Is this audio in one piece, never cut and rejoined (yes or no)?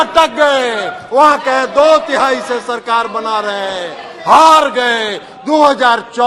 yes